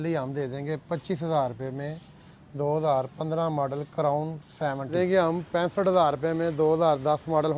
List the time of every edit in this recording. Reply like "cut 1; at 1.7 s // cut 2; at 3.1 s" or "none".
cut 1; at 4.9 s